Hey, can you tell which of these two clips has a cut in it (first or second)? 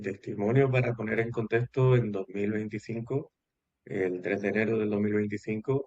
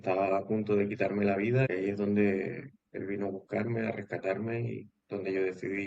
second